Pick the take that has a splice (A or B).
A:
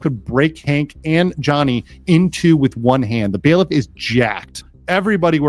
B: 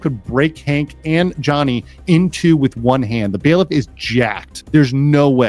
A